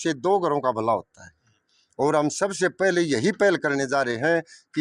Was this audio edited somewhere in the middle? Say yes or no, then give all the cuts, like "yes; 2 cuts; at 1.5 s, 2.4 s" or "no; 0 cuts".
no; 0 cuts